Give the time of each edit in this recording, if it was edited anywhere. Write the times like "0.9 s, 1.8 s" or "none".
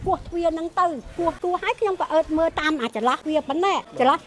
1.4 s, 3.4 s